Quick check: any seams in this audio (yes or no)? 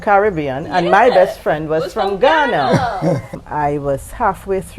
yes